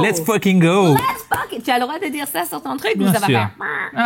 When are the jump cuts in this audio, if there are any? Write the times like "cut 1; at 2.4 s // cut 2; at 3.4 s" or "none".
none

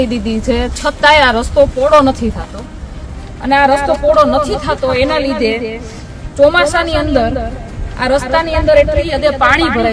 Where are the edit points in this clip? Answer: none

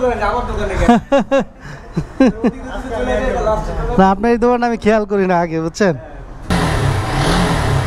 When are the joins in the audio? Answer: cut 1; at 6.5 s

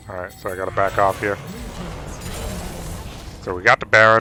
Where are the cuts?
none

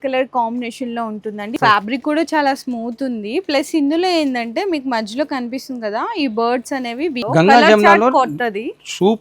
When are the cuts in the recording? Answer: cut 1; at 1.6 s // cut 2; at 7.2 s

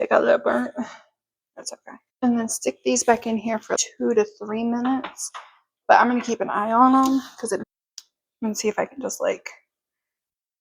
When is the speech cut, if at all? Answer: cut 1; at 7.6 s

